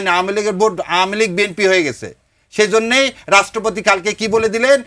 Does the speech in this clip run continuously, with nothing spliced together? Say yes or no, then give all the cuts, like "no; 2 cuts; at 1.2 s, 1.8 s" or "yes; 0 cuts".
yes; 0 cuts